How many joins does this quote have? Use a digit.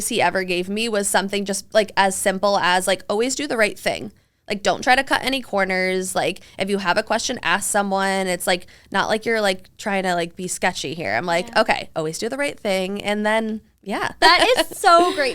1